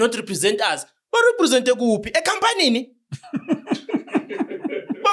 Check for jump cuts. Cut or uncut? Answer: uncut